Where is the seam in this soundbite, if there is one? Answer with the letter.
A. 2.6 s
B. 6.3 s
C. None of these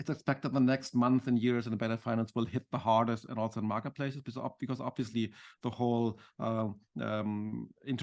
C